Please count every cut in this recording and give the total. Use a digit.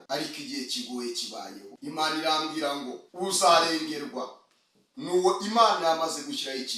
2